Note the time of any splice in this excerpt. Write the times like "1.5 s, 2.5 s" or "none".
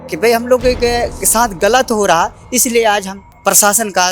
3.2 s